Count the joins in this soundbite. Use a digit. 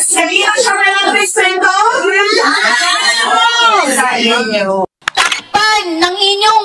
1